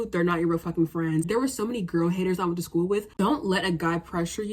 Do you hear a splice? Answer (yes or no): yes